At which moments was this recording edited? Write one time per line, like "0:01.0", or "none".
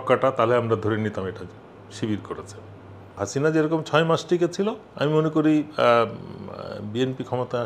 0:03.1
0:04.8